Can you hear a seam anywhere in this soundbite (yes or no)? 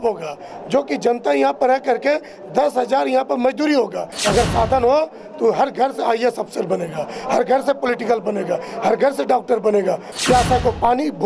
yes